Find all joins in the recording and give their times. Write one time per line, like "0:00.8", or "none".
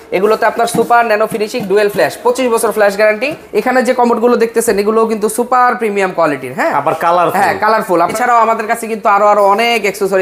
0:03.4
0:08.1